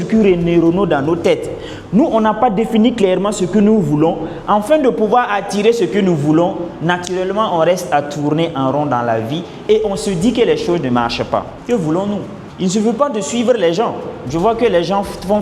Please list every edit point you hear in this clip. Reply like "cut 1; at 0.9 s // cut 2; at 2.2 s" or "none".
cut 1; at 11.5 s // cut 2; at 12.4 s